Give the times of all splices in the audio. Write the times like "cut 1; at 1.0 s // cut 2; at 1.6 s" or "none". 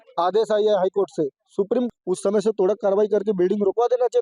cut 1; at 1.9 s